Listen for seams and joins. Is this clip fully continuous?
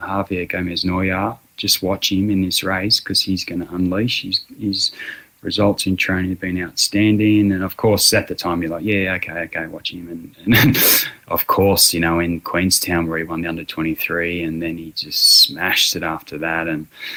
yes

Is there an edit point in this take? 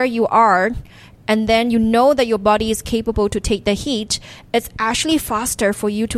no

